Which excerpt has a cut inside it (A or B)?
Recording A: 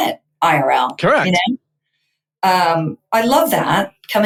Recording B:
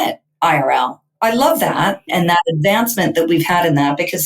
B